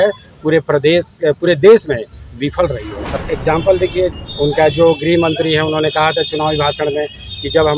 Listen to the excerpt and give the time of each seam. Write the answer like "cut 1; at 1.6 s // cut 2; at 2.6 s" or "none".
cut 1; at 3.1 s // cut 2; at 4.1 s